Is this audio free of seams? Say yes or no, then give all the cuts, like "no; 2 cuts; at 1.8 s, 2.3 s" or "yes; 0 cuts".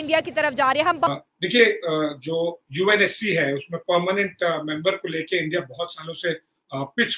no; 1 cut; at 1.1 s